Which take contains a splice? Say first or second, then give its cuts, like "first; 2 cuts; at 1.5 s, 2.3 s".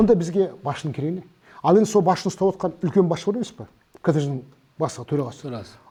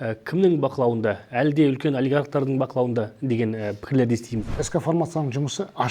second; 1 cut; at 4.6 s